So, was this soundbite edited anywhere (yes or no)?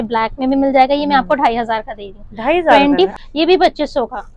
yes